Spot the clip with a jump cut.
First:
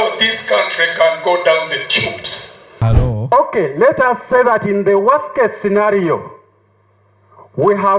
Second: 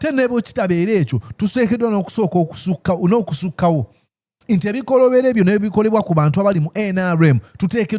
first; 1 cut; at 2.7 s

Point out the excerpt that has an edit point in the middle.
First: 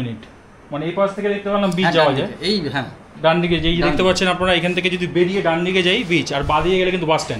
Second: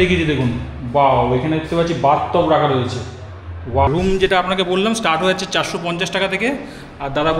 second; 1 cut; at 3.9 s

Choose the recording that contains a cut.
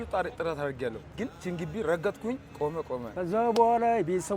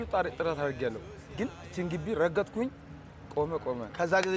first; 2 cuts; at 1.3 s, 2.9 s

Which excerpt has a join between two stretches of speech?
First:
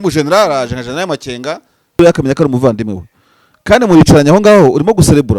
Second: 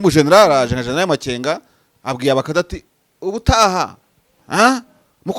first; 1 cut; at 2.0 s

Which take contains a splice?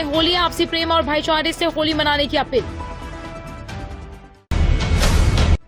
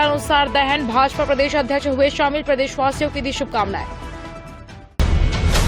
second; 1 cut; at 4.7 s

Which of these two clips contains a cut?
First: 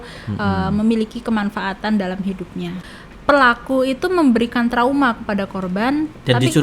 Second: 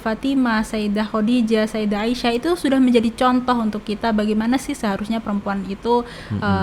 first; 1 cut; at 2.8 s

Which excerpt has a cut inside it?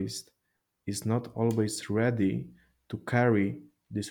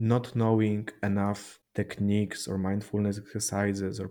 second; 1 cut; at 1.5 s

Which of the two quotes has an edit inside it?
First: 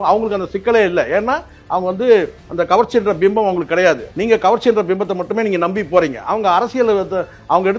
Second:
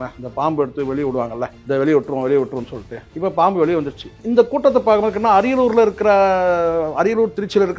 second; 1 cut; at 4.1 s

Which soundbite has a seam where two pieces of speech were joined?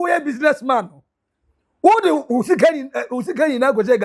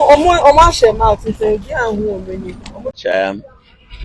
second; 1 cut; at 3.0 s

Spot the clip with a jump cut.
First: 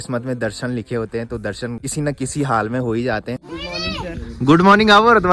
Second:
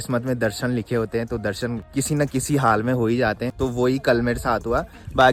first; 2 cuts; at 1.8 s, 3.3 s

